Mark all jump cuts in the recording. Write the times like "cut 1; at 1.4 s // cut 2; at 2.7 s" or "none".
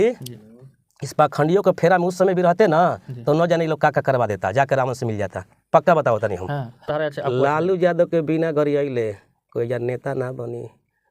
cut 1; at 6.9 s